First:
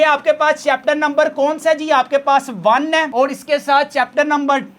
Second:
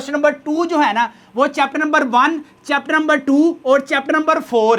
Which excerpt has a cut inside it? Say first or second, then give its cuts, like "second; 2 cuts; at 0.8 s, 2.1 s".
first; 1 cut; at 3.1 s